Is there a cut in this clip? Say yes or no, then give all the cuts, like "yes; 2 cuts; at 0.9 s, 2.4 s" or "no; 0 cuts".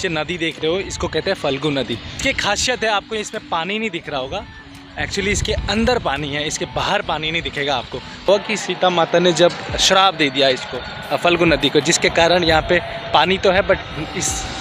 yes; 2 cuts; at 2.1 s, 8.3 s